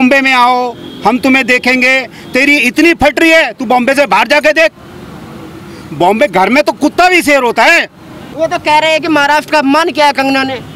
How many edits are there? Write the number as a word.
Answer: one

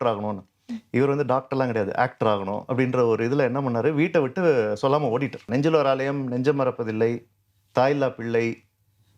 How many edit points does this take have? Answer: one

